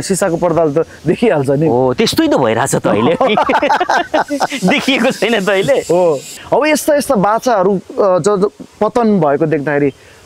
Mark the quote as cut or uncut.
cut